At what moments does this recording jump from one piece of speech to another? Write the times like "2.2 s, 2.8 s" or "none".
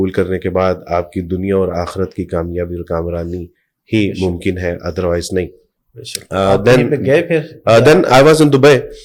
none